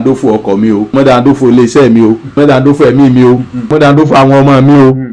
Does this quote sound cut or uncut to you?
cut